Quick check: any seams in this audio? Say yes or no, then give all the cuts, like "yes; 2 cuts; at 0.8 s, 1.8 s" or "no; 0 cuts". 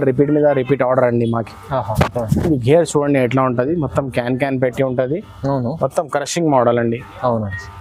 no; 0 cuts